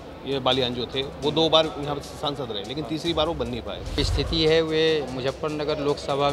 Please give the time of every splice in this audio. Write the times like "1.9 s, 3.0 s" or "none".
4.0 s